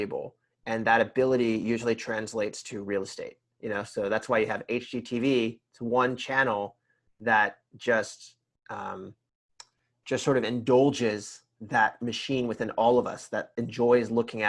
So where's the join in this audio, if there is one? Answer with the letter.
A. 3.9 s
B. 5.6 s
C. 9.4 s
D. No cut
D